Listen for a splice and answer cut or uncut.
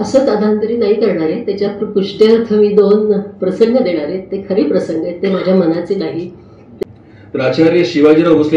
cut